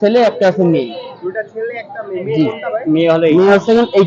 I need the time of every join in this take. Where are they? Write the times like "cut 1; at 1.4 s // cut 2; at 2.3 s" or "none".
none

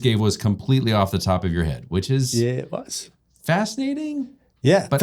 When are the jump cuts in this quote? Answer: none

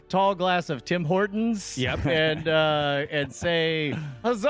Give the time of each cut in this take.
none

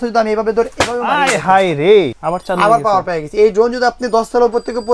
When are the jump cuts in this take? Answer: cut 1; at 2.1 s

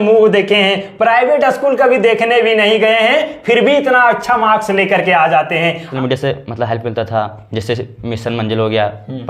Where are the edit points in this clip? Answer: cut 1; at 5.9 s

